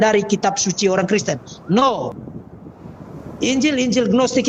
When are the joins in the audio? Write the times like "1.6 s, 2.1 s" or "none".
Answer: 2.1 s